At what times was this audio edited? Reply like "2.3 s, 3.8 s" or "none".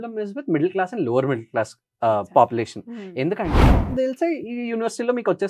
3.7 s